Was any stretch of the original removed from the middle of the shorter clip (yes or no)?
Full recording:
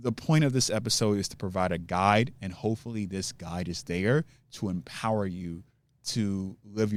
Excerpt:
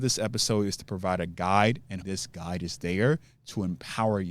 yes